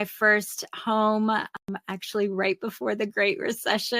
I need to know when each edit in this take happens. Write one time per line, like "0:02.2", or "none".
0:01.6